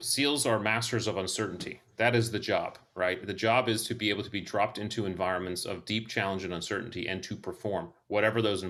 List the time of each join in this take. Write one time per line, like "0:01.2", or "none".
none